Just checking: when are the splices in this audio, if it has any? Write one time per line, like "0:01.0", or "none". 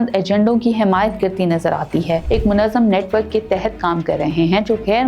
0:02.2

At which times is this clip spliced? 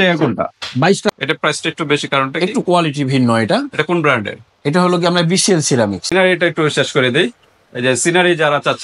0:01.1
0:06.0

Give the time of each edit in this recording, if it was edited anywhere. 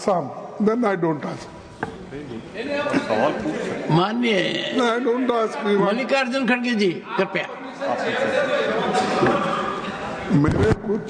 none

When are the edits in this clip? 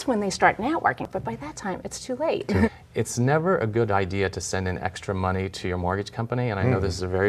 0:01.1
0:02.7

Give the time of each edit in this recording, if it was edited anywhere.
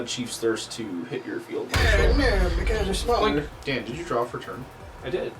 0:03.5

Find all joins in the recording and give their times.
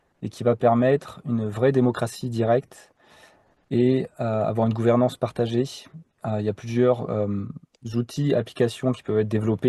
none

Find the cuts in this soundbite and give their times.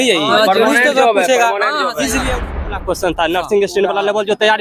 0:02.3

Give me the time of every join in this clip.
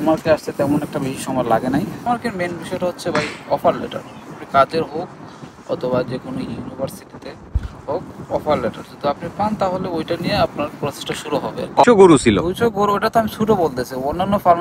0:02.0
0:11.8

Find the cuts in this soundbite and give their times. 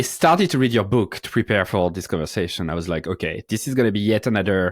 none

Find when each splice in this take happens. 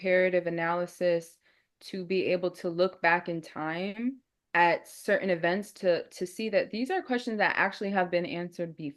none

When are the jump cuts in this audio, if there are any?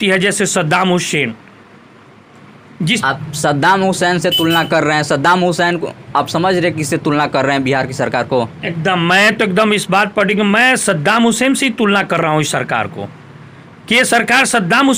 none

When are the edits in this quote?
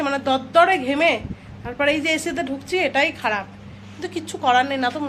none

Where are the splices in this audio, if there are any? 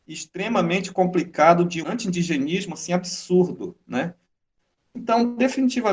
0:01.8

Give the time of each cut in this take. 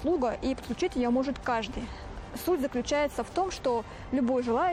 none

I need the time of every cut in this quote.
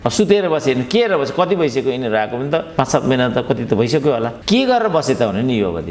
none

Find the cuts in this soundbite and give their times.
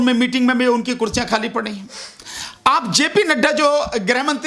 none

